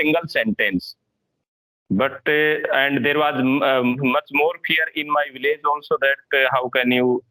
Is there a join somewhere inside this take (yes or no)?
no